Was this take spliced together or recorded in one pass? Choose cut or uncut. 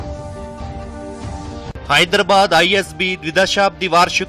uncut